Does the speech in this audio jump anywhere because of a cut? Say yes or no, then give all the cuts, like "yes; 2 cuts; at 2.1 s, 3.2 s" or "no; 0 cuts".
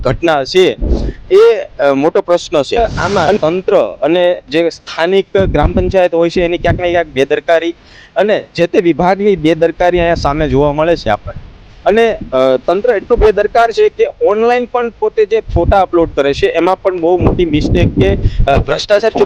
yes; 1 cut; at 2.8 s